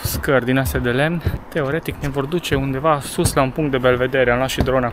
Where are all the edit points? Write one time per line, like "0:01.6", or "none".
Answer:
0:01.4